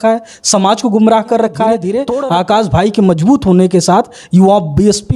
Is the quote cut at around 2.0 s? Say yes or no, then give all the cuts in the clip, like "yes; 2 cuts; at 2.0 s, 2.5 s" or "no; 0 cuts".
yes; 1 cut; at 2.0 s